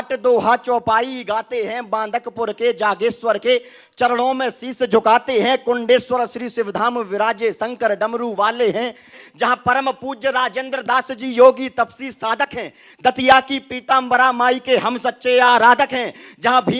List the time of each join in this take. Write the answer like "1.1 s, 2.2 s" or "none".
9.2 s